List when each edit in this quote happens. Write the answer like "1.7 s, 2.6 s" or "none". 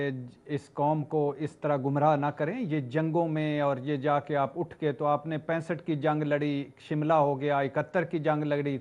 none